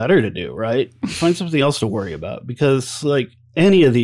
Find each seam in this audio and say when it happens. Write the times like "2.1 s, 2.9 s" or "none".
none